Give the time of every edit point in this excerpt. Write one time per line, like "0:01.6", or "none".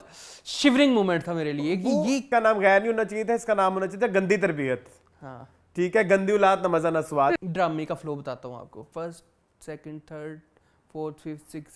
0:02.3
0:07.4
0:08.9